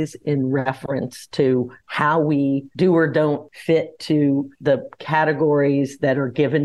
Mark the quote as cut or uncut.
cut